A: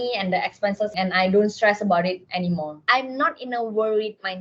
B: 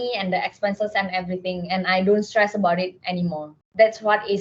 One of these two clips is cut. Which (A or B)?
A